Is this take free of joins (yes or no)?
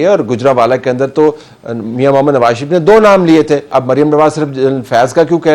no